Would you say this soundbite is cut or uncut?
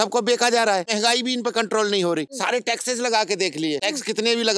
cut